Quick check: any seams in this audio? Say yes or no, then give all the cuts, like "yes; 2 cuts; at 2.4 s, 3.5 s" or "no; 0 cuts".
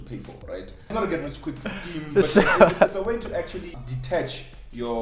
yes; 1 cut; at 0.9 s